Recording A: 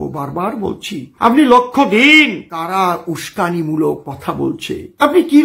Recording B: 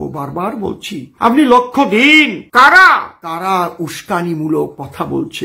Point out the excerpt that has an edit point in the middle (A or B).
A